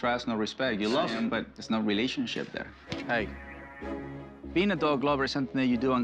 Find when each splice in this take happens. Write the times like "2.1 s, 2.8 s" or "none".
1.1 s, 2.8 s